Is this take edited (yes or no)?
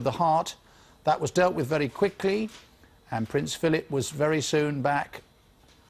no